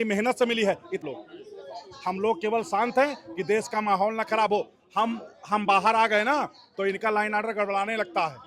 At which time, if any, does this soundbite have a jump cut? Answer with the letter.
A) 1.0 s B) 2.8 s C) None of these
A